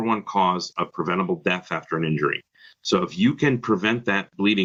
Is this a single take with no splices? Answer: yes; 0 cuts

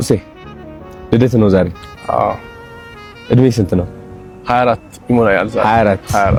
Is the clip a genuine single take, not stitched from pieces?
yes; 0 cuts

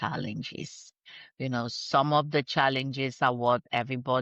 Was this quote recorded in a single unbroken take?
yes; 0 cuts

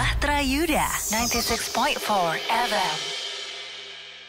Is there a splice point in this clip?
no; 0 cuts

